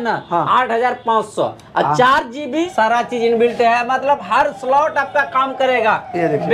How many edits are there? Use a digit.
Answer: 1